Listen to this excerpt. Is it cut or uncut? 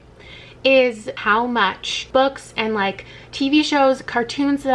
cut